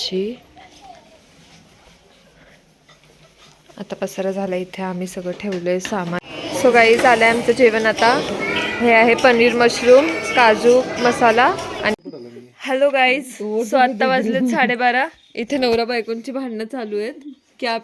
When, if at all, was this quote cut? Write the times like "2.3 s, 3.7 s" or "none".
6.2 s, 11.9 s